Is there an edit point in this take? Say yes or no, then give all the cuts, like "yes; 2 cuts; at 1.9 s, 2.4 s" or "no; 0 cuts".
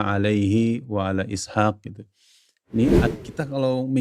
yes; 1 cut; at 3.1 s